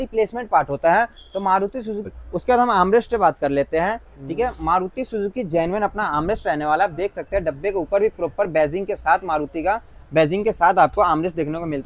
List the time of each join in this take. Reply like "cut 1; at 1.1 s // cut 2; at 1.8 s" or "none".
cut 1; at 2.1 s

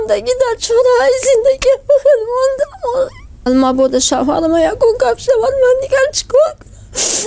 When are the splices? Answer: cut 1; at 3.4 s

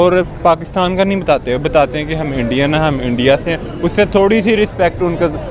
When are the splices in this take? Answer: none

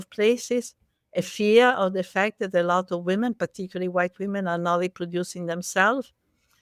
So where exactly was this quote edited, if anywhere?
none

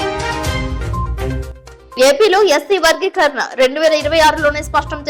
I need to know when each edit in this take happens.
cut 1; at 1.3 s

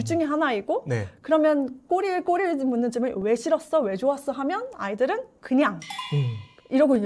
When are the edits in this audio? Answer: none

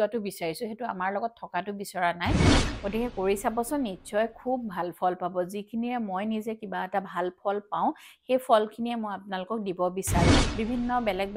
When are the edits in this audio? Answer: cut 1; at 2.6 s // cut 2; at 10.4 s

